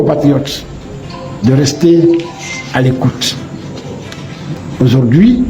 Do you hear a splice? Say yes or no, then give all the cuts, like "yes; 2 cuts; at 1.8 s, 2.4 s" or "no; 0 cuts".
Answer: yes; 1 cut; at 4.6 s